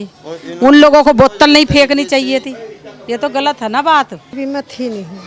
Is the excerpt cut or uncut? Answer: uncut